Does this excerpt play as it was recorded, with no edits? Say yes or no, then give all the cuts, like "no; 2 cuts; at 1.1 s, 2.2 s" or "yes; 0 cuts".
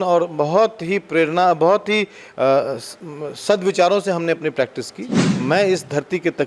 no; 1 cut; at 5.4 s